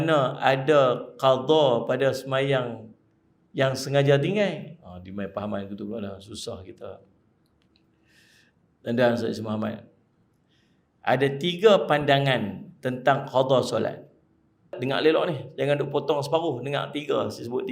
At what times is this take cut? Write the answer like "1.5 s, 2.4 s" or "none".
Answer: 14.8 s

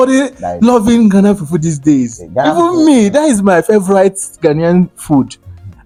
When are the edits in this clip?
none

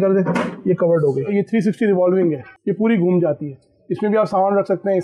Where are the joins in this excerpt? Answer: 1.3 s, 2.5 s

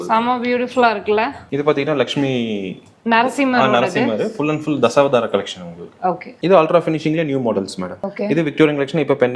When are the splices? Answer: none

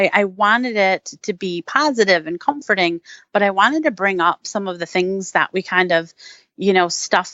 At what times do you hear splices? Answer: none

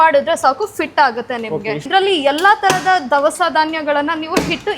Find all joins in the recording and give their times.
1.9 s

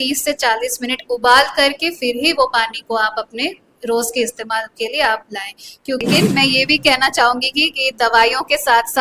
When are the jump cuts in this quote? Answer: 6.0 s

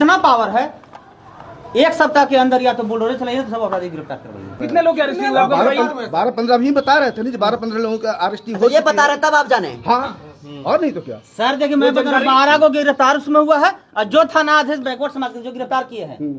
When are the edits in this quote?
4.6 s

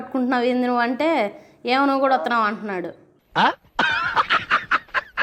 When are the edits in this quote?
none

